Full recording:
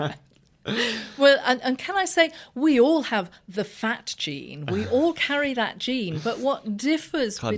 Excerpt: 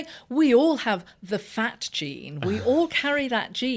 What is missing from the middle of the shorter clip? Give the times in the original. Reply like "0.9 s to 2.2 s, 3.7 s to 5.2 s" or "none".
none